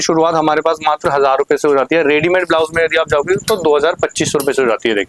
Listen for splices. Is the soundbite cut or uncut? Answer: uncut